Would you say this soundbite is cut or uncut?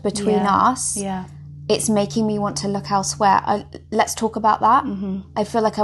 uncut